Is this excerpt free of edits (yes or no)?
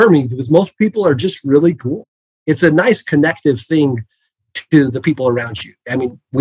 no